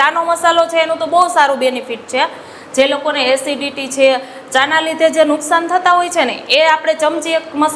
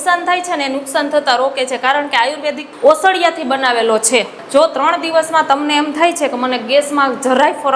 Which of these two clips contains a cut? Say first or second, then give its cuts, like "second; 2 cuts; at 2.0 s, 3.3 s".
second; 2 cuts; at 2.7 s, 4.4 s